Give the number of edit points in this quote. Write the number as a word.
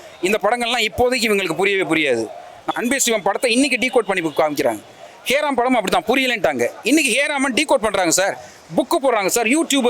one